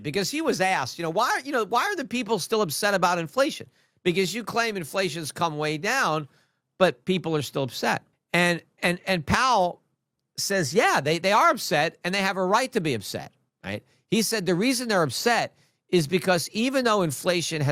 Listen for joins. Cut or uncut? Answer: cut